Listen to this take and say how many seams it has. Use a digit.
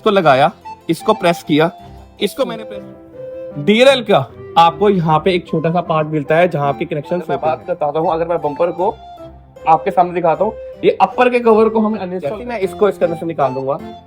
3